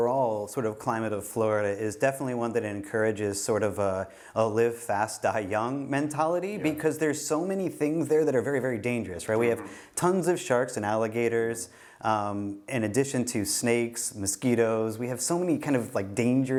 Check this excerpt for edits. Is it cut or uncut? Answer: uncut